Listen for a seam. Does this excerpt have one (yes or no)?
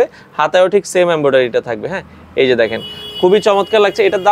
no